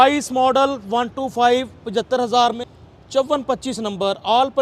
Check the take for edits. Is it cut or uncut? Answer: cut